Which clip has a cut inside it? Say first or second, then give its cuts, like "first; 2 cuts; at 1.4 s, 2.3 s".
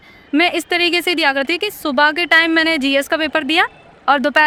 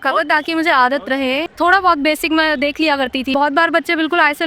second; 2 cuts; at 1.5 s, 3.3 s